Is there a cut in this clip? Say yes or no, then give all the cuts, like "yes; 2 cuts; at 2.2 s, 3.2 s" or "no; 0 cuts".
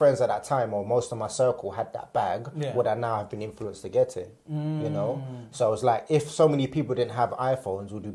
no; 0 cuts